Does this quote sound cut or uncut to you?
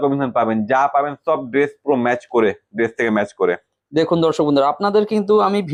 uncut